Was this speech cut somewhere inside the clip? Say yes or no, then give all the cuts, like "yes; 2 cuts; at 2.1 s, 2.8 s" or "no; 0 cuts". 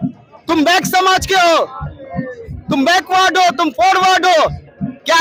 no; 0 cuts